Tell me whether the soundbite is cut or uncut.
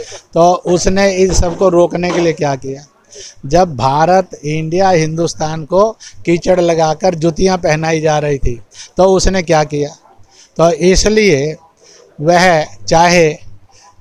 uncut